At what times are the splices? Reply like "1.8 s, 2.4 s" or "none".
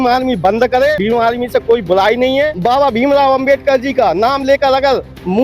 1.0 s, 2.6 s